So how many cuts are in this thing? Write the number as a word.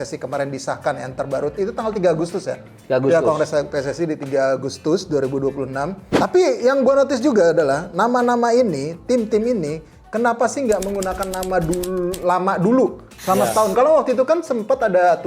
one